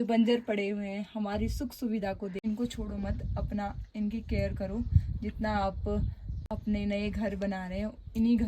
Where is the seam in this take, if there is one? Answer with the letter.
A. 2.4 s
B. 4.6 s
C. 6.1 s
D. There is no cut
A